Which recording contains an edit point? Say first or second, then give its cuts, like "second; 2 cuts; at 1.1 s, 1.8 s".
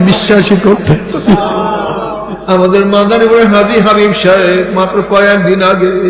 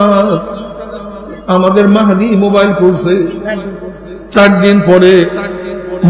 first; 1 cut; at 2.3 s